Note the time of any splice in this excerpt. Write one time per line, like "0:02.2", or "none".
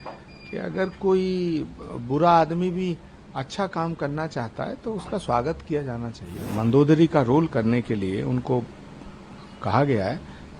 0:06.4